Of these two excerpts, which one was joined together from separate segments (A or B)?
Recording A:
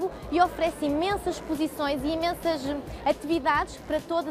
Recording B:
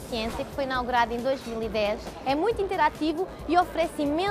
B